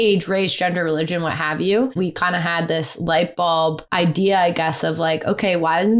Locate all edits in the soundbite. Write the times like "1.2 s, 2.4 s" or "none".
1.9 s, 3.8 s

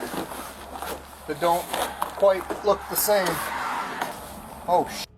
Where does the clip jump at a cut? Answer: 4.2 s

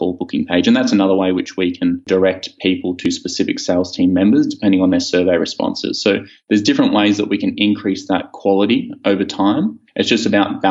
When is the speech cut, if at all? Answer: 2.1 s

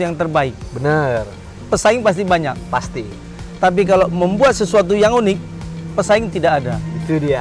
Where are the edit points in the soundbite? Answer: none

